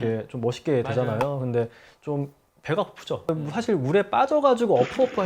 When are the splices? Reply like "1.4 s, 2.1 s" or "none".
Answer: 3.3 s